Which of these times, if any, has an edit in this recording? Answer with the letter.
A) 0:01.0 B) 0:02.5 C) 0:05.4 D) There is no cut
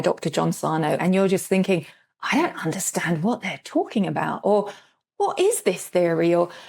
A